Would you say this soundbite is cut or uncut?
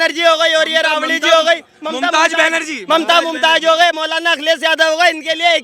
uncut